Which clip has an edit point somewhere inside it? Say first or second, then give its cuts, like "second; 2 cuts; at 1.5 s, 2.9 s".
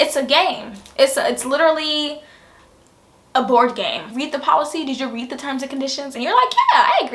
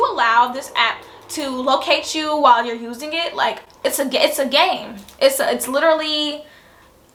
first; 1 cut; at 4.0 s